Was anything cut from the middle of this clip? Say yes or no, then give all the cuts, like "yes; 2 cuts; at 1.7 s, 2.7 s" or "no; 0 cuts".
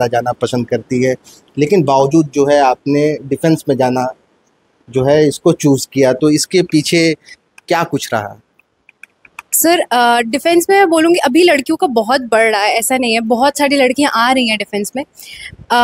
no; 0 cuts